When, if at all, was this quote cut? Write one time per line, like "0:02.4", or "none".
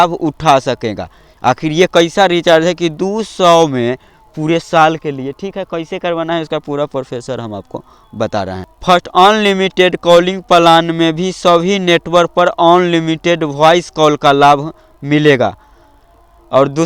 0:08.7